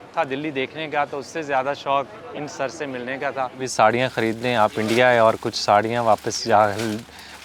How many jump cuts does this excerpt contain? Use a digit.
1